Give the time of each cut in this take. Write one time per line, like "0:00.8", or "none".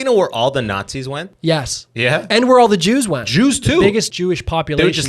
0:01.3
0:03.3
0:04.1